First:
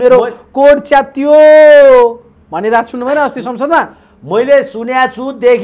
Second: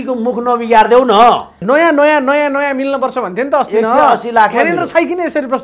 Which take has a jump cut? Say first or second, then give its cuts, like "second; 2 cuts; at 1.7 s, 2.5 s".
second; 1 cut; at 1.6 s